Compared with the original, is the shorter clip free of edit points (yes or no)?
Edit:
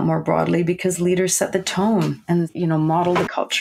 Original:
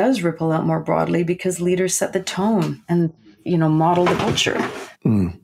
no